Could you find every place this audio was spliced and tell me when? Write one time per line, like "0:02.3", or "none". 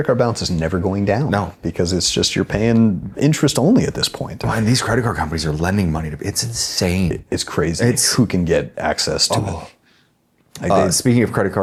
none